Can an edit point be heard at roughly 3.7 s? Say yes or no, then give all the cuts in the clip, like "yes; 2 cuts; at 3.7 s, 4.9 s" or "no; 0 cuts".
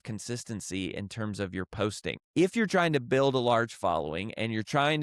no; 1 cut; at 2.2 s